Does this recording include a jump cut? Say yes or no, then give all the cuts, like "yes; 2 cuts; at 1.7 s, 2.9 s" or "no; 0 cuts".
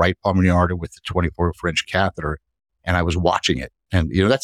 no; 0 cuts